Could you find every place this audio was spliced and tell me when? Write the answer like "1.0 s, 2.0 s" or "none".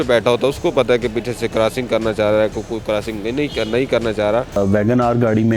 4.6 s